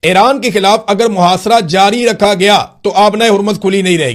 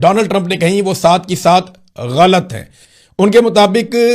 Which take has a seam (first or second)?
second